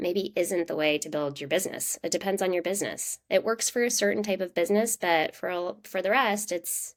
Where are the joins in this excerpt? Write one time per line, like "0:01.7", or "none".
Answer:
none